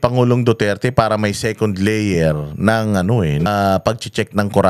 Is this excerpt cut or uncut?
cut